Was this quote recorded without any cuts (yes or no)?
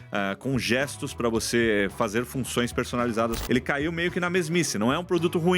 no